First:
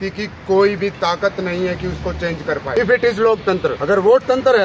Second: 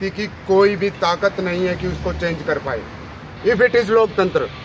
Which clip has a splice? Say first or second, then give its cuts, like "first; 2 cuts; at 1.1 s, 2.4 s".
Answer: first; 2 cuts; at 2.7 s, 3.8 s